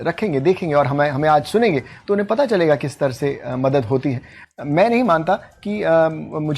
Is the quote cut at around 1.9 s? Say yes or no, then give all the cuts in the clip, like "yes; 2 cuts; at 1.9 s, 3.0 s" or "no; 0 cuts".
no; 1 cut; at 4.4 s